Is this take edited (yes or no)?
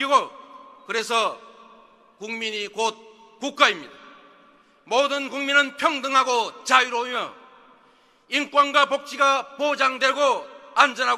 yes